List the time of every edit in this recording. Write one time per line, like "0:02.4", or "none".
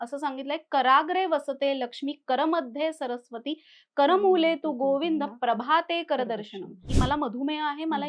0:06.9